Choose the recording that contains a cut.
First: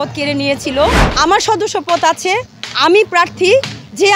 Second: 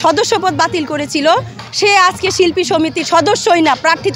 first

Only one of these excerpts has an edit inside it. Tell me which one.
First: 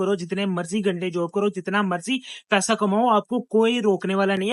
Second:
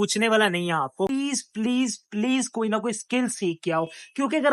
second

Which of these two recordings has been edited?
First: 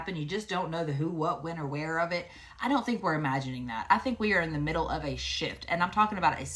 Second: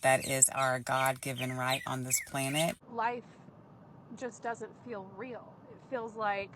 second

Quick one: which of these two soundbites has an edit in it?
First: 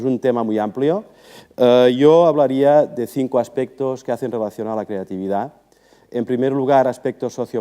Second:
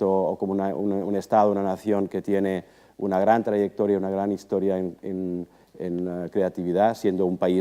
first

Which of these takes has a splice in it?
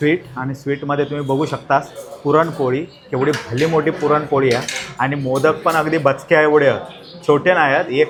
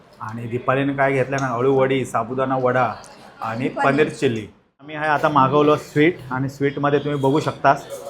second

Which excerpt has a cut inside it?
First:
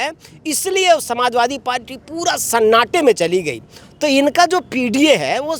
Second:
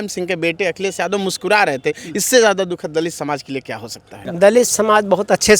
second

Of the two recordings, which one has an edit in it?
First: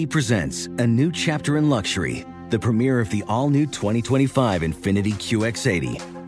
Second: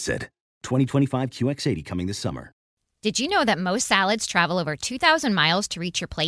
second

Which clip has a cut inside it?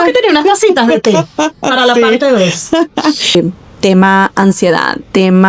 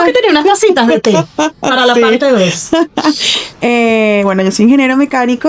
first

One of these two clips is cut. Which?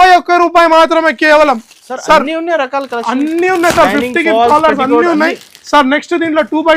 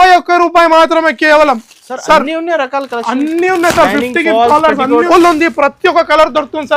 second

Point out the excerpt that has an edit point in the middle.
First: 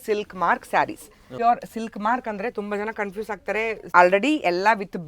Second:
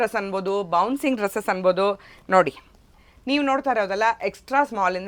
first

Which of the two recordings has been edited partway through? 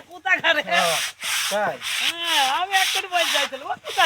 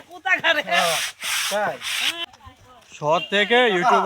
second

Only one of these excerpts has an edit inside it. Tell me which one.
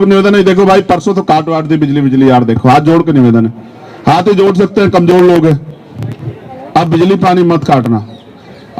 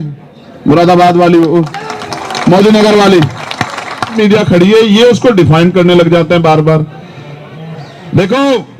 second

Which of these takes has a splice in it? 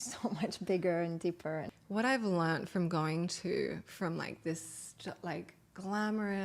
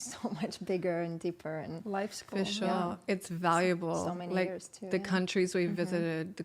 first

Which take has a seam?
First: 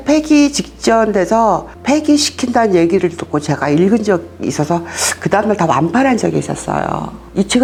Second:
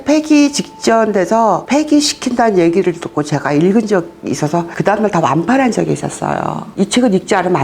second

